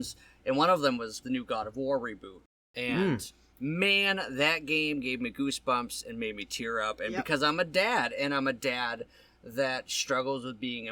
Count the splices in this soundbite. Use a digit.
1